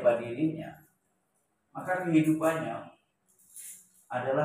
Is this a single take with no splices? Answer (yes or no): yes